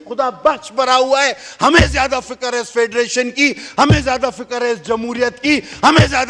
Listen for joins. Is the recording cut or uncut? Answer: uncut